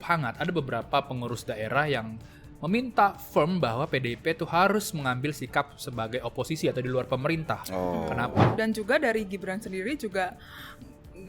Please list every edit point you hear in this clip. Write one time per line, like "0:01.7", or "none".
0:08.5